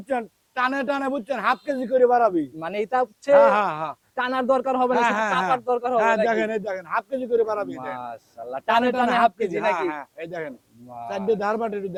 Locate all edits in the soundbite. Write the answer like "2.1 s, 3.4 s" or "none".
none